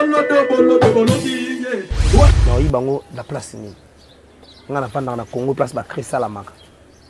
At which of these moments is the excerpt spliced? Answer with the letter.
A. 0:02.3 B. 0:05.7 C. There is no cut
A